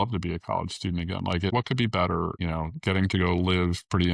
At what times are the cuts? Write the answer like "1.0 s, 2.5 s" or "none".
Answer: 1.5 s, 2.4 s